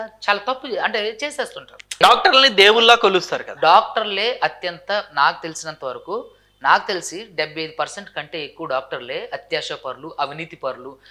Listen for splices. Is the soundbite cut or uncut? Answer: cut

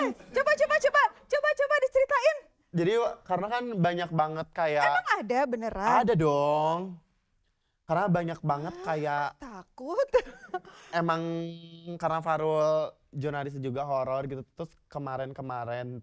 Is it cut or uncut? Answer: uncut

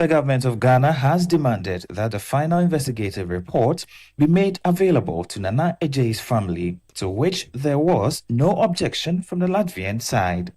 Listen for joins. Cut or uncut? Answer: uncut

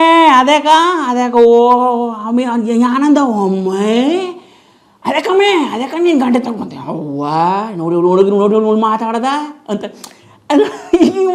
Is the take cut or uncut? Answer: uncut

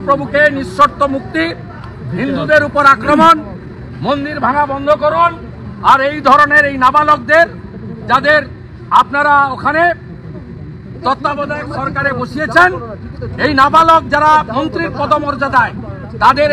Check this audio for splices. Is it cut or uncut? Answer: uncut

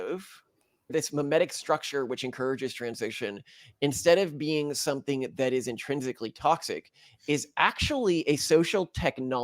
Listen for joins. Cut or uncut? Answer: cut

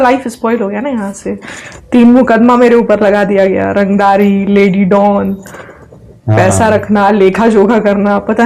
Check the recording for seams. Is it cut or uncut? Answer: uncut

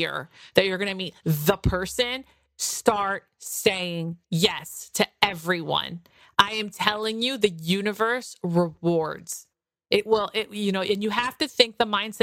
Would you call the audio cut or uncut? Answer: uncut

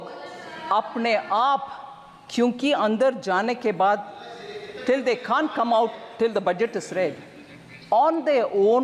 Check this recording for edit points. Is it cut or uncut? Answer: uncut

